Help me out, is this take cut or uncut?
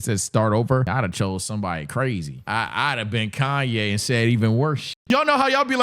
cut